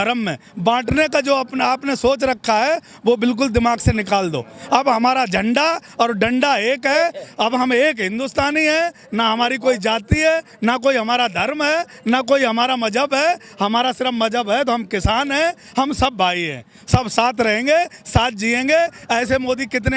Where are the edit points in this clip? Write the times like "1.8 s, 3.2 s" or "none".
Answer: none